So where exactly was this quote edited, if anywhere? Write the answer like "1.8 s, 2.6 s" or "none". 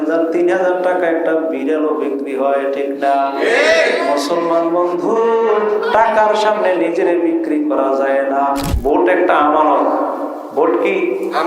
8.7 s